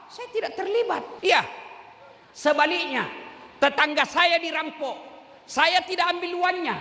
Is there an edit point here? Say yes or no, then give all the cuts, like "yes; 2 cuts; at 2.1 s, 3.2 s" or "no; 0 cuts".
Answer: yes; 1 cut; at 1.1 s